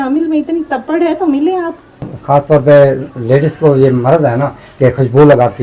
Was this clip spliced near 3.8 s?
no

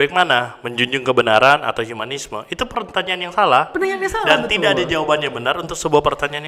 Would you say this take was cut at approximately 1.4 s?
no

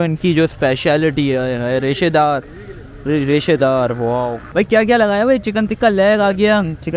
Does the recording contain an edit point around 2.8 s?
no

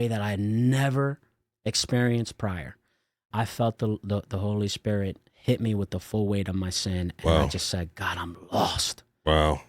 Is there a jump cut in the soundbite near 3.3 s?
yes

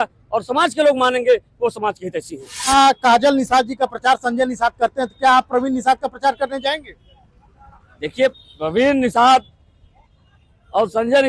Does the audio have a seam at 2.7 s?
yes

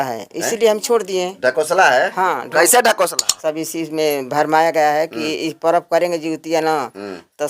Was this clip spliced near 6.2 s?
no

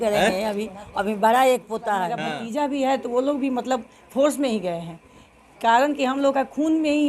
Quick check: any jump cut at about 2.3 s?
yes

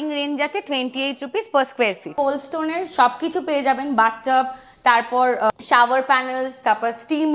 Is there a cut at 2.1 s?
yes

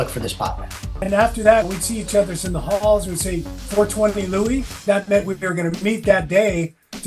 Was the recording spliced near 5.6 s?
no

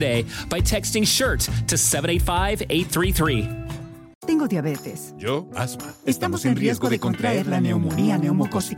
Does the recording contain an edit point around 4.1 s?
yes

